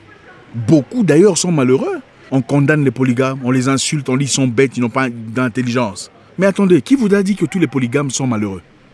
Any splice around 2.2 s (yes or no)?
yes